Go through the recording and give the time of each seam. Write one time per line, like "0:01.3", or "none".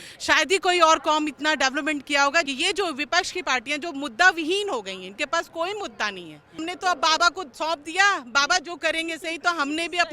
0:02.5
0:06.6